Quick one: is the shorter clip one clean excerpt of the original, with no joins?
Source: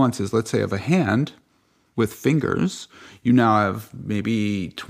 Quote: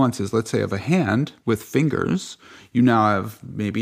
no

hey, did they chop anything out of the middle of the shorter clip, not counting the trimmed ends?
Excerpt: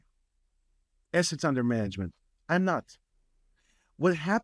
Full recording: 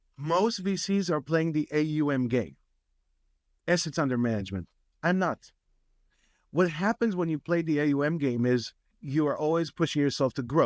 no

